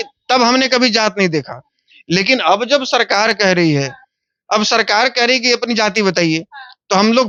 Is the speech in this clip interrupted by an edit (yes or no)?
no